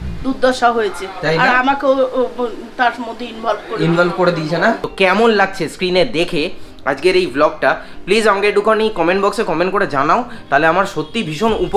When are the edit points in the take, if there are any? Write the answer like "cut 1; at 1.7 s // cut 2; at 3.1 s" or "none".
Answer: cut 1; at 4.9 s